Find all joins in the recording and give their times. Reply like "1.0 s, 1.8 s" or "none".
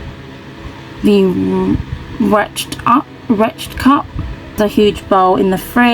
4.6 s